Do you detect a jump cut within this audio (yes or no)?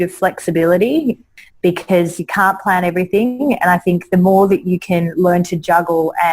yes